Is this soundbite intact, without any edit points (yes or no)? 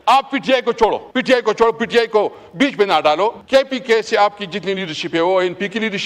no